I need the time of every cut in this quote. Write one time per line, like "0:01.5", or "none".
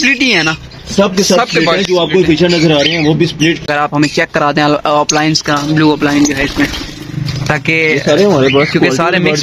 0:03.7

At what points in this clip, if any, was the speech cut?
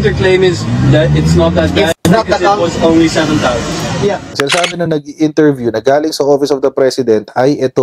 0:02.0
0:04.3

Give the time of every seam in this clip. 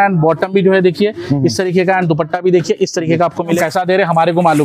0:03.6

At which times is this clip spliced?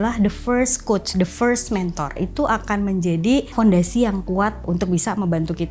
0:02.2
0:03.5
0:04.6

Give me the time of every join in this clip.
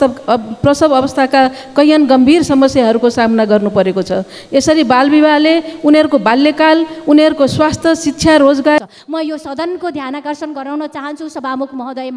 0:08.8

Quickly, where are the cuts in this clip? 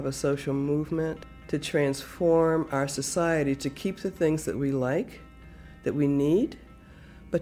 0:01.3

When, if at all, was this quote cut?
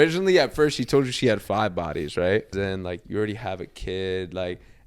0:02.5

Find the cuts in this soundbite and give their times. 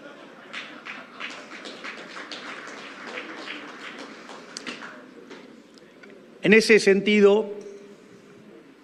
none

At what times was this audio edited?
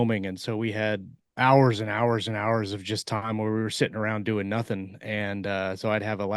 0:01.2

